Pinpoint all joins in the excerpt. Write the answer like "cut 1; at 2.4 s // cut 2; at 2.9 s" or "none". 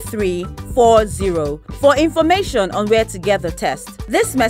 none